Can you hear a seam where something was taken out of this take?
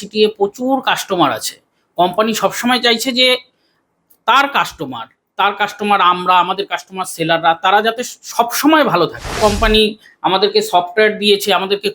yes; 1 cut; at 9.4 s

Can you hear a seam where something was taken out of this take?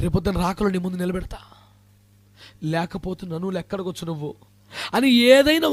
no; 0 cuts

